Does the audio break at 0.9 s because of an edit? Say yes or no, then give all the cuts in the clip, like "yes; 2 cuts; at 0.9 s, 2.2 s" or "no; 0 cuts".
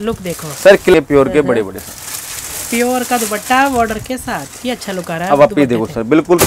yes; 1 cut; at 0.9 s